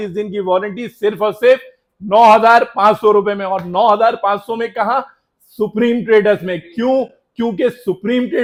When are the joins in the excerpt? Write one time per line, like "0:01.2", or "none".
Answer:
none